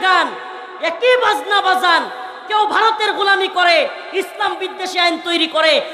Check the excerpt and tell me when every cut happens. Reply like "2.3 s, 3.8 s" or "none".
none